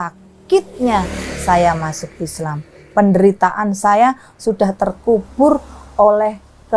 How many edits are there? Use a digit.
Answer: 0